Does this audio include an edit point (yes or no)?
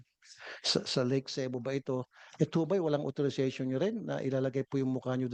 no